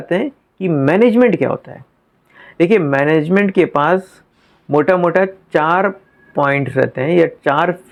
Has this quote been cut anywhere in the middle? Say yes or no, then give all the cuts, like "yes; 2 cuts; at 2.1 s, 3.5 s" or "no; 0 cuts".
no; 0 cuts